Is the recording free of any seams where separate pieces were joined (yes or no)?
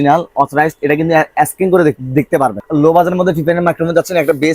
no